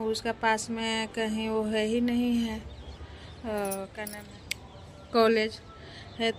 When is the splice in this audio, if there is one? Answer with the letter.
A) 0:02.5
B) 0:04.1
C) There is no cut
B